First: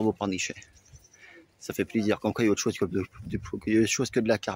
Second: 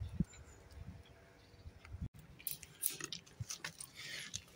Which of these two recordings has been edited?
second; 1 cut; at 2.1 s

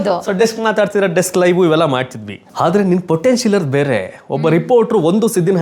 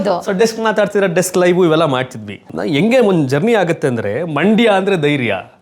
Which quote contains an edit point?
second; 1 cut; at 2.5 s

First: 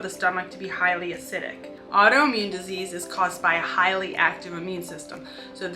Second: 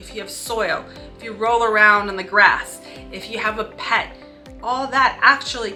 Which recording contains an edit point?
first; 1 cut; at 1.7 s

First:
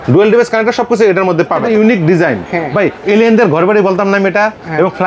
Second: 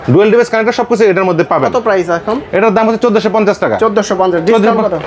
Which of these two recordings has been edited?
first; 1 cut; at 1.6 s

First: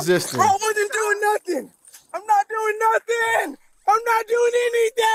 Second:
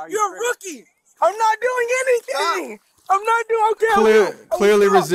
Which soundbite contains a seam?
second; 1 cut; at 1.0 s

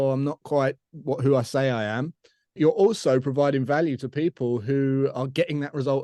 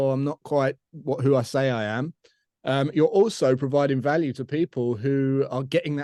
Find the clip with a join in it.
first; 1 cut; at 2.5 s

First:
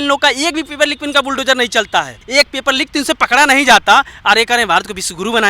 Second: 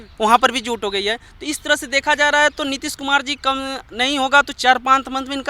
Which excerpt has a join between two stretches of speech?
first; 1 cut; at 2.2 s

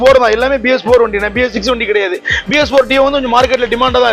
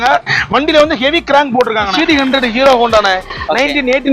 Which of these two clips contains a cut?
second; 1 cut; at 1.9 s

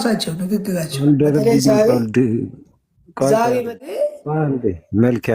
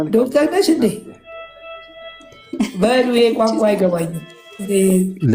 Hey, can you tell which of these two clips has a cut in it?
first; 1 cut; at 3.9 s

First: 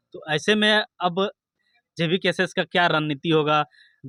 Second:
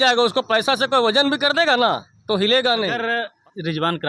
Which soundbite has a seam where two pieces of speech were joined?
second; 1 cut; at 3.0 s

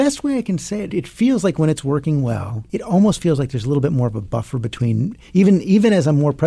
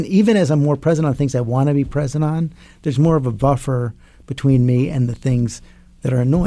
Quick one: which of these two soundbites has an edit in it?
first; 2 cuts; at 0.9 s, 2.6 s

